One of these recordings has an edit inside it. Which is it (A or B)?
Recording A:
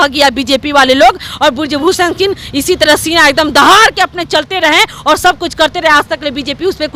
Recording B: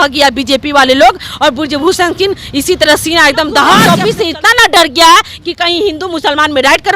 B